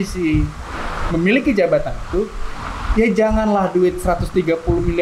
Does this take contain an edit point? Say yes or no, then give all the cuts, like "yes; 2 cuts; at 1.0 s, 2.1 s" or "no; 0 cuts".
no; 0 cuts